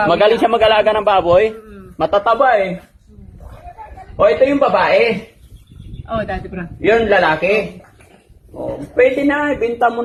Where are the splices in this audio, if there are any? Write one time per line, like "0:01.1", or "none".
none